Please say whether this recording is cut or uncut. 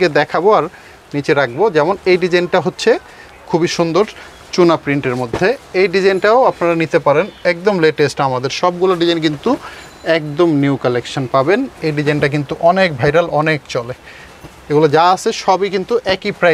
uncut